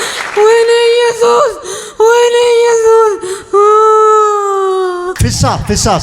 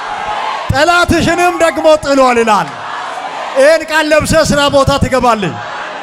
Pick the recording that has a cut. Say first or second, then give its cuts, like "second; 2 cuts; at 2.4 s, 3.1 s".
first; 1 cut; at 5.1 s